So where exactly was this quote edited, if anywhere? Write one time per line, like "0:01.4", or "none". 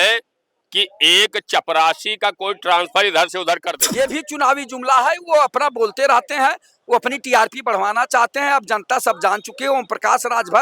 0:03.8